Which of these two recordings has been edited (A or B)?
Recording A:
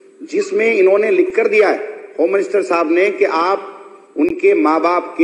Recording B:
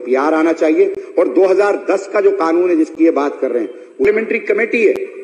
B